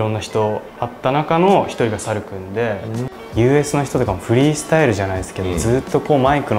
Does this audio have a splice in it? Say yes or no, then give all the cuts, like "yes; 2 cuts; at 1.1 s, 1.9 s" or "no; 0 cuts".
yes; 1 cut; at 3.1 s